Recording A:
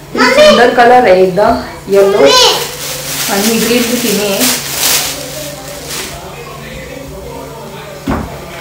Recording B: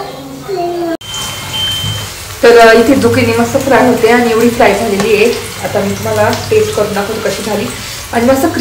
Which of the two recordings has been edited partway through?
B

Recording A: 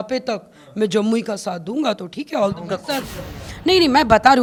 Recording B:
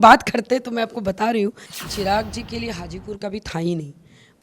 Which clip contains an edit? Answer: B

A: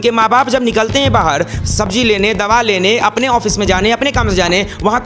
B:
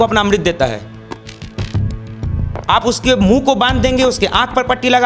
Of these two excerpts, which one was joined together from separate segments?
B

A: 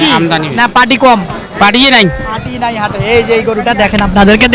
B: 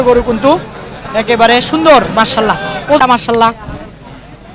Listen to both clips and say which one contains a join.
B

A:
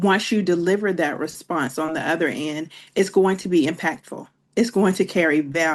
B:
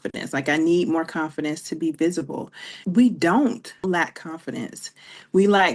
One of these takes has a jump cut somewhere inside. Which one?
B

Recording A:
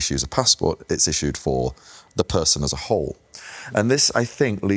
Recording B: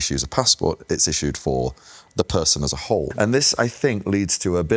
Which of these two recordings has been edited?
B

